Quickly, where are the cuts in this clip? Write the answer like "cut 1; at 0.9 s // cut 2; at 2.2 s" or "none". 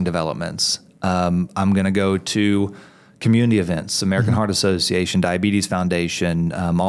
none